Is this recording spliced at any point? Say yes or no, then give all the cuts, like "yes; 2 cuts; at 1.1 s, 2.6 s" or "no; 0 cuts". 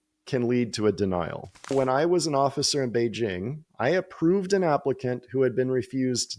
yes; 1 cut; at 1.7 s